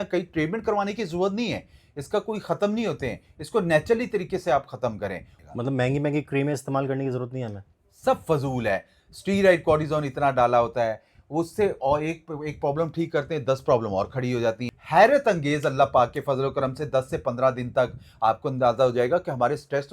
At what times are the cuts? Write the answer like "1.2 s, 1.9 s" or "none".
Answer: 5.3 s, 14.7 s